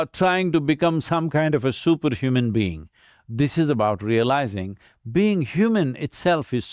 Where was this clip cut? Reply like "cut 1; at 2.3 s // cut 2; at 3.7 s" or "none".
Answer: none